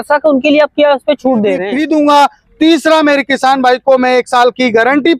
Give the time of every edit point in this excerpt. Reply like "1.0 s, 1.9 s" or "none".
1.7 s